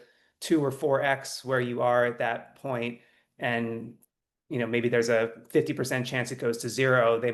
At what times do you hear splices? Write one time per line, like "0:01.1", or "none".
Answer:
none